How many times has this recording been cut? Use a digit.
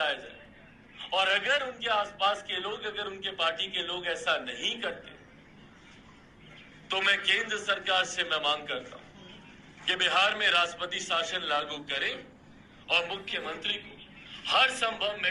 0